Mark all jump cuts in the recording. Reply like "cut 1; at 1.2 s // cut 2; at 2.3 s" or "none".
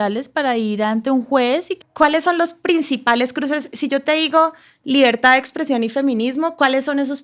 cut 1; at 1.8 s